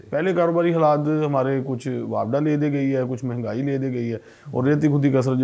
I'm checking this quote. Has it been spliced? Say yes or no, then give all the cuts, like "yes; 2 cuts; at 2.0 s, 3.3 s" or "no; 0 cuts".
no; 0 cuts